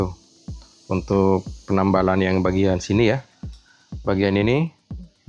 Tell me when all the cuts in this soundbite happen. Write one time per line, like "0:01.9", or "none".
none